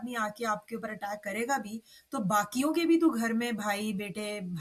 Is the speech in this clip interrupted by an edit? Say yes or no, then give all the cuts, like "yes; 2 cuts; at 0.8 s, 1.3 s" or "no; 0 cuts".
no; 0 cuts